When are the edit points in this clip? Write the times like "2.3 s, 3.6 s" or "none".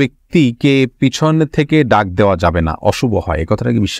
none